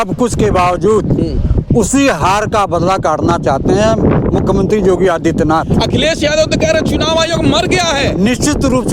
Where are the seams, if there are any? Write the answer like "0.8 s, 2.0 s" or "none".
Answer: none